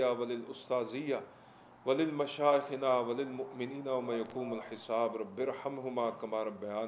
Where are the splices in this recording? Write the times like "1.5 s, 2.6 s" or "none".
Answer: none